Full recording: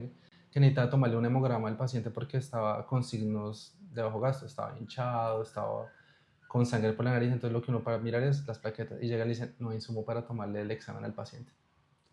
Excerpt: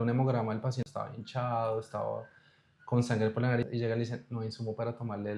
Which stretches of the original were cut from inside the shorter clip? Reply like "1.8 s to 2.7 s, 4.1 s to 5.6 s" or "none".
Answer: 2.0 s to 4.5 s, 7.3 s to 8.9 s